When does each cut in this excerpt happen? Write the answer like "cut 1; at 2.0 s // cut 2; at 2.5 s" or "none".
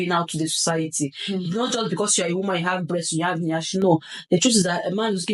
none

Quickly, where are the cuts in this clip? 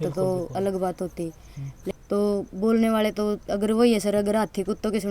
cut 1; at 1.9 s

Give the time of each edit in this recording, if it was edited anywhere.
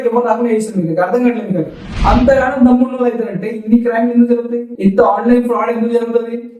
cut 1; at 1.8 s

